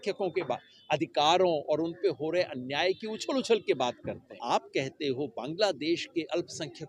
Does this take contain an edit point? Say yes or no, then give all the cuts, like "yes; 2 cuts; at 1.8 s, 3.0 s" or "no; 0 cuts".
yes; 1 cut; at 4.4 s